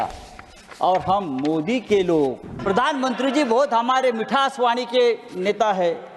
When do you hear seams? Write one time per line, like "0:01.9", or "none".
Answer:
0:02.6